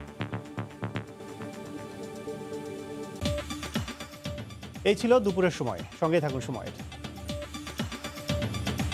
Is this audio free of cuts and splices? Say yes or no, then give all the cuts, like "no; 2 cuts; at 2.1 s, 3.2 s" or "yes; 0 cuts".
yes; 0 cuts